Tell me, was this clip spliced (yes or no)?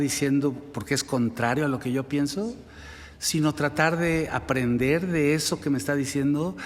no